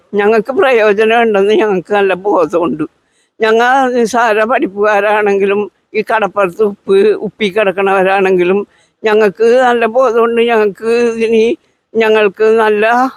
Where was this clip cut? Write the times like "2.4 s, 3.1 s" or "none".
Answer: none